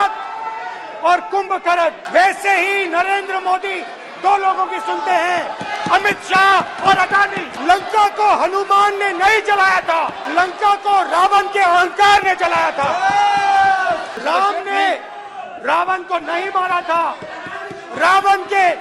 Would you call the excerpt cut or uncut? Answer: cut